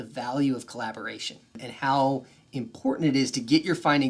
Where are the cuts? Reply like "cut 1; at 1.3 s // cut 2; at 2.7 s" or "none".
cut 1; at 1.7 s